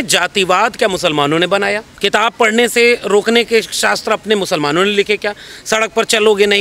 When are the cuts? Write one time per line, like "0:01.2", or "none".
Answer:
0:01.9